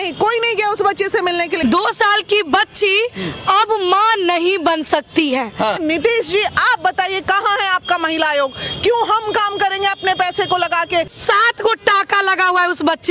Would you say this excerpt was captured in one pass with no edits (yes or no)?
no